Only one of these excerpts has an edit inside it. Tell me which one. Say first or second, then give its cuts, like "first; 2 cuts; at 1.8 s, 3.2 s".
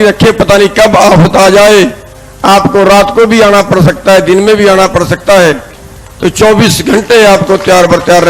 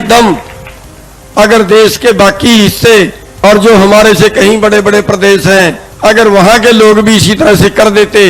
second; 2 cuts; at 3.2 s, 5.9 s